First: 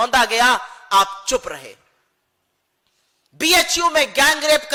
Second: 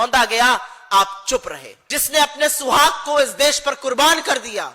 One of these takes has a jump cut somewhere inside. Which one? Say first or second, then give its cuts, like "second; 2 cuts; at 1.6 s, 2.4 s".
second; 1 cut; at 1.7 s